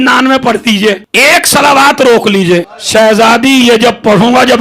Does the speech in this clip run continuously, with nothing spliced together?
no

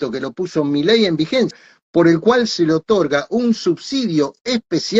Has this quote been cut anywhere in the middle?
yes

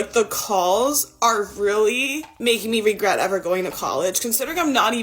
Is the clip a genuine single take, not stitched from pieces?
no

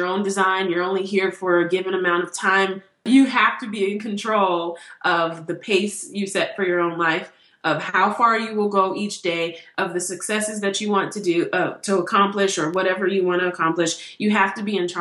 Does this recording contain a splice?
yes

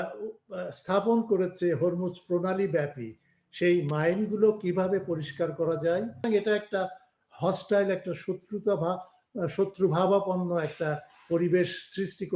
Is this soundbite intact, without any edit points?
no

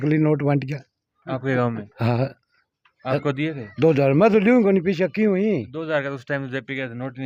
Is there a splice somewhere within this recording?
no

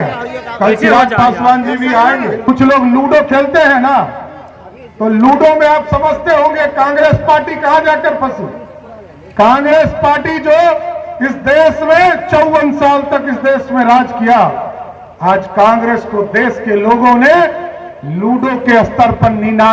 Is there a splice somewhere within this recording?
yes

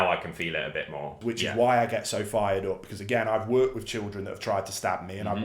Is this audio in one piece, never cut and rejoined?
no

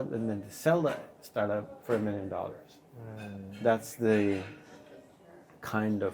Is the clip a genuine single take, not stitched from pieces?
yes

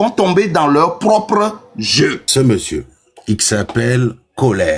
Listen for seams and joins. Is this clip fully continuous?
no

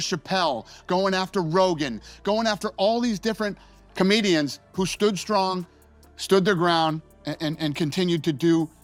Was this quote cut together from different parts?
no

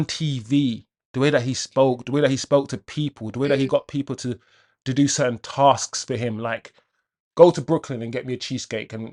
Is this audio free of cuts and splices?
yes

